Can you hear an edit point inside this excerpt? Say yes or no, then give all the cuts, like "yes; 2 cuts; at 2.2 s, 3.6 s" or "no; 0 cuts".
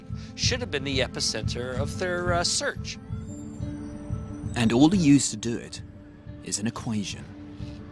yes; 1 cut; at 1.9 s